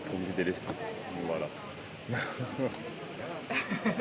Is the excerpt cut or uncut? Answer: uncut